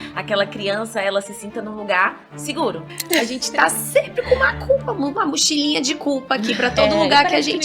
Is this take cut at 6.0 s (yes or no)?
no